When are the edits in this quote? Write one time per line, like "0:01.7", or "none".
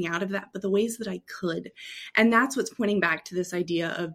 none